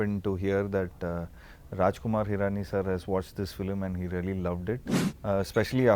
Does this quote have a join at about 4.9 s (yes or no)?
yes